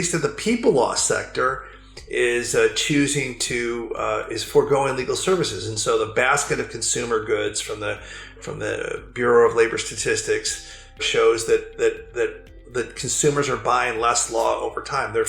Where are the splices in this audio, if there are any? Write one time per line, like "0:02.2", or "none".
0:11.1